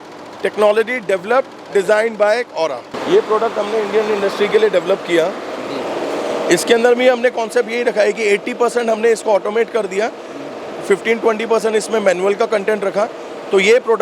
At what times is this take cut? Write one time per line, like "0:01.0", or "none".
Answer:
0:02.9